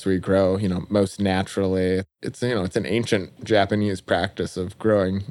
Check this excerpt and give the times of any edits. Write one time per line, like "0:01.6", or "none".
0:02.1